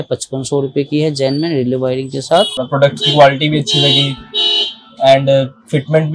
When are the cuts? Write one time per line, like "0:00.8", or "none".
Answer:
0:02.6